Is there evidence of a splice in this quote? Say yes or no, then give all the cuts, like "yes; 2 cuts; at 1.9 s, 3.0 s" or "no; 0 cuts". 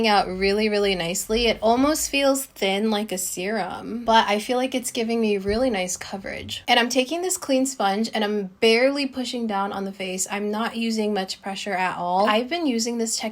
no; 0 cuts